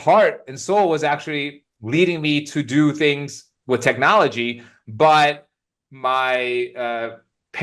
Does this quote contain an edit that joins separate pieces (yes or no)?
no